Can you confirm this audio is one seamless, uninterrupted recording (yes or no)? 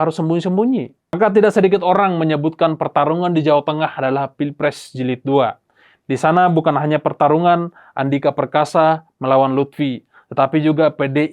no